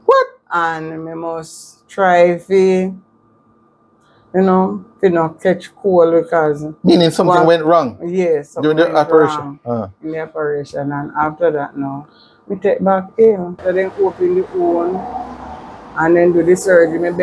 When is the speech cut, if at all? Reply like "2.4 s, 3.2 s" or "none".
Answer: 13.6 s